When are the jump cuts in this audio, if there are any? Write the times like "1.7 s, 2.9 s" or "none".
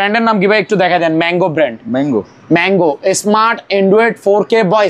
none